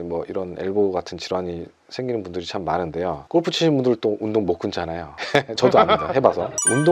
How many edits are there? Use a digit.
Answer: 1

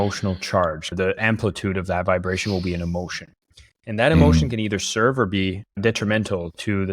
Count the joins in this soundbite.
1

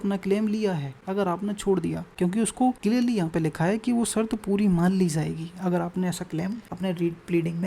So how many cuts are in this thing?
4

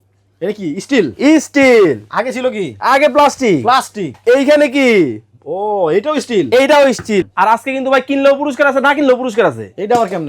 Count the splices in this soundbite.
1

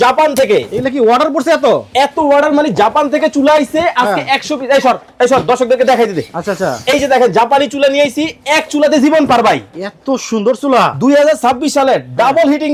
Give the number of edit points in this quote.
0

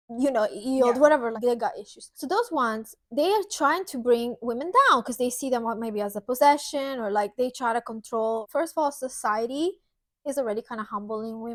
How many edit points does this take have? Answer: 0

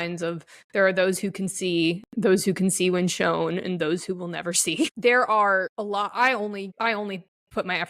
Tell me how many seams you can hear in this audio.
3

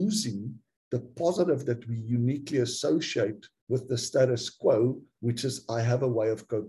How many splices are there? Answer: 2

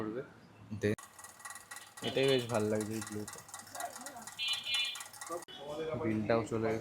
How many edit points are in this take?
2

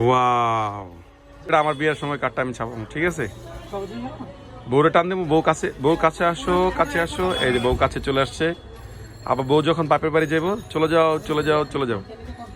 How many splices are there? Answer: 1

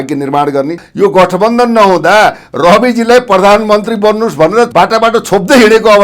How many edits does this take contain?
2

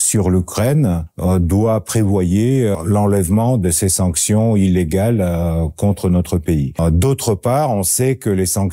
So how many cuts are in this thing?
3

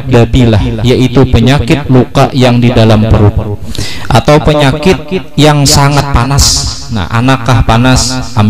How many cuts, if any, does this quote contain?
1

